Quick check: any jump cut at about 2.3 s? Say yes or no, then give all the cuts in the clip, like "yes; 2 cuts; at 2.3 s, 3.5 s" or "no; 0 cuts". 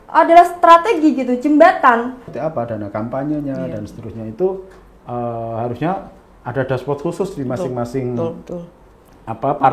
yes; 1 cut; at 2.3 s